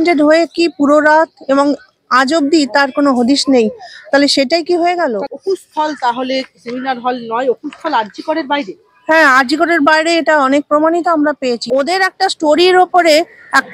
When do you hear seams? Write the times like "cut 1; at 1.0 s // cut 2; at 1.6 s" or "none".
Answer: cut 1; at 5.2 s // cut 2; at 11.6 s